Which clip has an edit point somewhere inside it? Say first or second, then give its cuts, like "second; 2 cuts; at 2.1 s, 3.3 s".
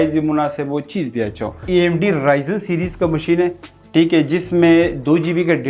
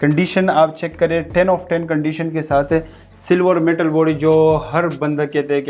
first; 1 cut; at 1.6 s